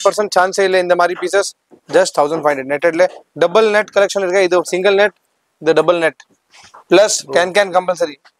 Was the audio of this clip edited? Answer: no; 0 cuts

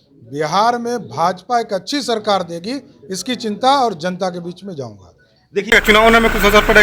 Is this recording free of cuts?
no; 1 cut; at 5.7 s

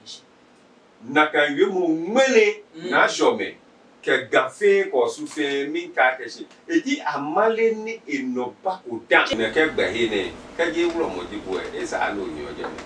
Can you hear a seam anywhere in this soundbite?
yes; 1 cut; at 9.3 s

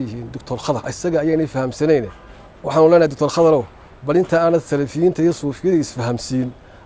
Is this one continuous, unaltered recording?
no; 1 cut; at 0.9 s

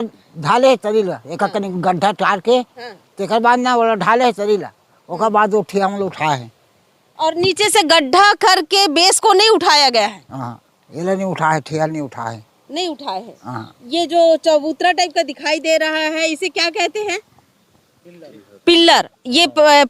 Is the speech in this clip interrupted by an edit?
no; 0 cuts

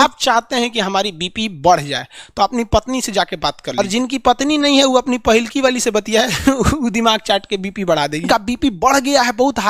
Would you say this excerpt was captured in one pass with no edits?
no; 2 cuts; at 3.8 s, 8.2 s

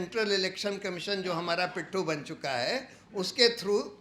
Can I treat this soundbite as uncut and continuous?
yes; 0 cuts

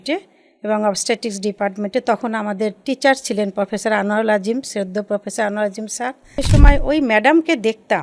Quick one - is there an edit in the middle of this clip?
yes; 1 cut; at 6.4 s

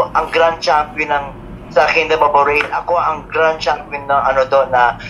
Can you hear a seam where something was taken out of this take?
no; 0 cuts

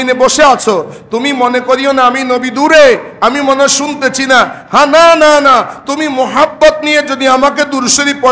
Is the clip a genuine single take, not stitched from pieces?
yes; 0 cuts

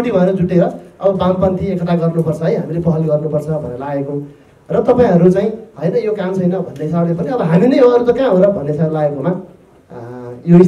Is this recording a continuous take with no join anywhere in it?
yes; 0 cuts

